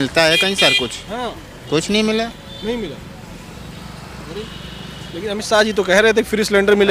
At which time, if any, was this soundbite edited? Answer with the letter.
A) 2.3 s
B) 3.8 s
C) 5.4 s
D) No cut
D